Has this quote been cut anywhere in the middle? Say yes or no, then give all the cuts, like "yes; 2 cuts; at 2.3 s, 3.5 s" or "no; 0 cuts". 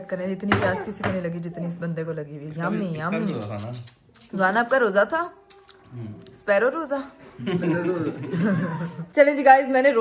no; 0 cuts